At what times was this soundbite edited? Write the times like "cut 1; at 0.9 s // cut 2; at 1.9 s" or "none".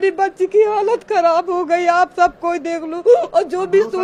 none